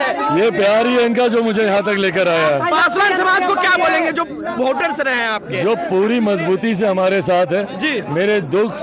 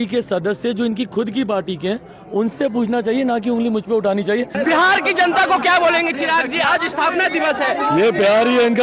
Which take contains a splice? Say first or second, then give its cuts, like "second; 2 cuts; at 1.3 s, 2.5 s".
second; 1 cut; at 4.5 s